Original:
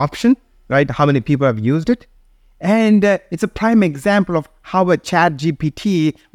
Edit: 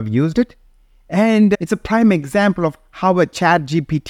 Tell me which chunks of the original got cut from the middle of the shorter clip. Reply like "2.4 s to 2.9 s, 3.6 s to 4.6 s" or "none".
3.1 s to 3.3 s